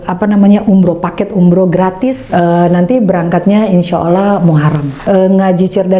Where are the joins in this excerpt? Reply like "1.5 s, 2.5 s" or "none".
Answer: 2.2 s, 4.9 s